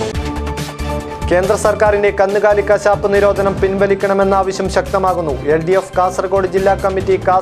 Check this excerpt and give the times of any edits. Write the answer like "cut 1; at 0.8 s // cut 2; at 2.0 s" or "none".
none